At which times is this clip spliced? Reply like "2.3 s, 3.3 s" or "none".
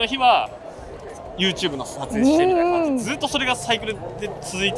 none